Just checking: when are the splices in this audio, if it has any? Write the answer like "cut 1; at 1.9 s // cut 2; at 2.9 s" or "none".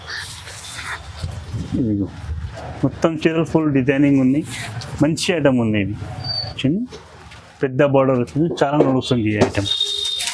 cut 1; at 6.6 s